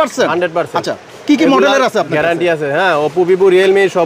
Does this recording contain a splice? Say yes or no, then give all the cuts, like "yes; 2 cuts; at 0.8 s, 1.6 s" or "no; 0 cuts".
no; 0 cuts